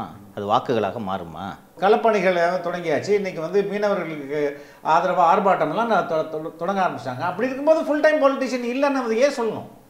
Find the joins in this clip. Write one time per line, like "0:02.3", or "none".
0:01.7